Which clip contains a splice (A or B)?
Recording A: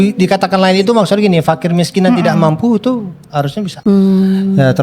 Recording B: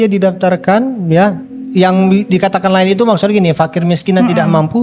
A